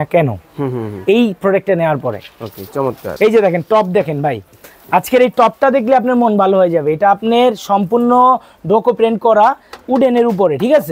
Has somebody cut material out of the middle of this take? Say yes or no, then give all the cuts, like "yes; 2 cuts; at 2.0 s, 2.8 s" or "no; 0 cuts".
yes; 1 cut; at 3.0 s